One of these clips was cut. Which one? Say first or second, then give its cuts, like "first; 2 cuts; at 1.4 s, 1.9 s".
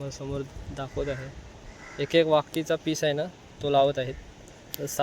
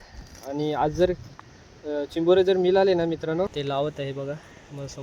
second; 1 cut; at 3.5 s